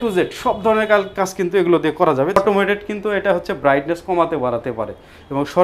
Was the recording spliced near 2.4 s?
yes; 1 cut; at 2.4 s

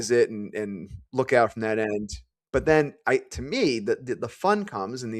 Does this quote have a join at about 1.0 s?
yes; 1 cut; at 1.0 s

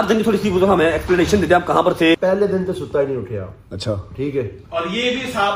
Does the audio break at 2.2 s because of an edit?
yes; 1 cut; at 2.2 s

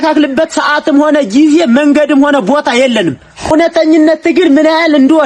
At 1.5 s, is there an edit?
no; 1 cut; at 3.4 s

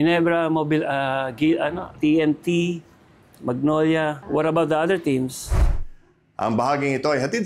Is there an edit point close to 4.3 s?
no; 1 cut; at 5.5 s

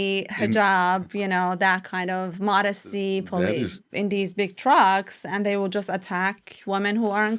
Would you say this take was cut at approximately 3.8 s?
yes; 1 cut; at 3.8 s

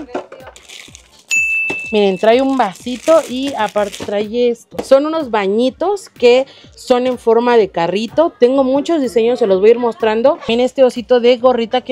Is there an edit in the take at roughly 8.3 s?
no; 2 cuts; at 4.8 s, 10.5 s

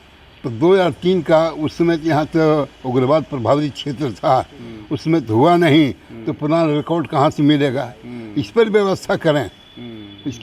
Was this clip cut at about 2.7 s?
no; 0 cuts

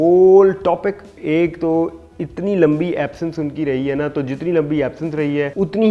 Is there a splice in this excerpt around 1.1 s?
yes; 1 cut; at 1.1 s

